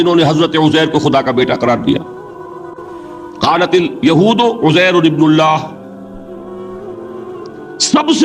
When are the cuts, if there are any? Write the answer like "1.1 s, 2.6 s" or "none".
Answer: none